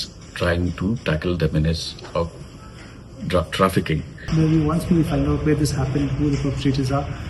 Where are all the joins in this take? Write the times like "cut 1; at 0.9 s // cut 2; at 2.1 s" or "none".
cut 1; at 4.3 s